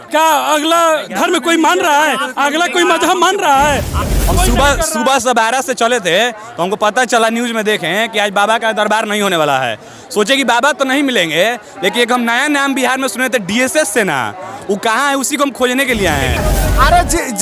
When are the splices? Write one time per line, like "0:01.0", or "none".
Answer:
0:04.1
0:16.4